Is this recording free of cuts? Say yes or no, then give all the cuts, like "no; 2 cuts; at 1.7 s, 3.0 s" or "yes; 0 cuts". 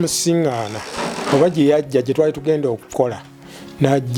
yes; 0 cuts